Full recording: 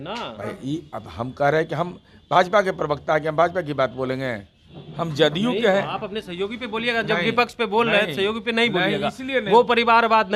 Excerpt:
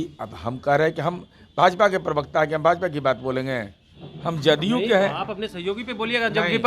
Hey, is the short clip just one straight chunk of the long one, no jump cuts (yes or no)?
yes